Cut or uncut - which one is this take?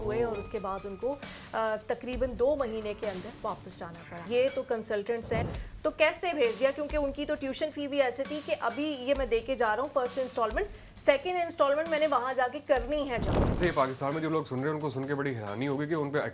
cut